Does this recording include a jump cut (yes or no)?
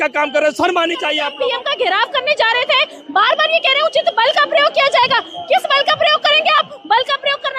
yes